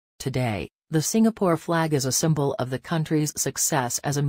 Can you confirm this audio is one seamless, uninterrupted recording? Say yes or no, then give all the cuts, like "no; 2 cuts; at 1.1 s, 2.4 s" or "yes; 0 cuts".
no; 1 cut; at 3.3 s